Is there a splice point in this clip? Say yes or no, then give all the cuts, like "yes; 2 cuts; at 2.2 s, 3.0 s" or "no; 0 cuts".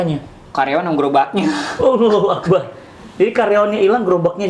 no; 0 cuts